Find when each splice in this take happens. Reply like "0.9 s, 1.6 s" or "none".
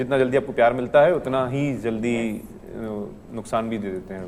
none